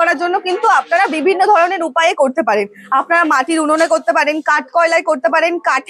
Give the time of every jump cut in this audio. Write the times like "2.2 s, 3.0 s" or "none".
none